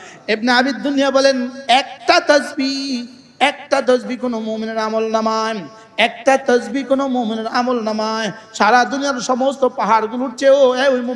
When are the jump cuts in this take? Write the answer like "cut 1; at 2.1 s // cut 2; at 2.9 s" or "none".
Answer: none